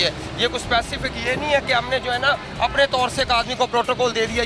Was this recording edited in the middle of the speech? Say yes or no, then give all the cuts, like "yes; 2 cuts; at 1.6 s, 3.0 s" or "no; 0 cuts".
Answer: no; 0 cuts